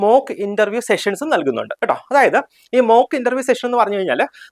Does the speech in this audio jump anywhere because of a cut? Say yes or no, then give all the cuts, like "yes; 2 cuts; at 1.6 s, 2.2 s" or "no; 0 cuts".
no; 0 cuts